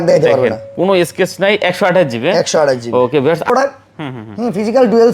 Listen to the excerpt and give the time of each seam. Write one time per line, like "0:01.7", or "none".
0:03.4